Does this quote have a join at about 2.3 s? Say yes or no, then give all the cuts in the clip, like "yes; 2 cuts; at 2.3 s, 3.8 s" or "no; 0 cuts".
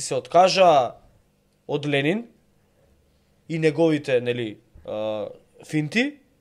no; 0 cuts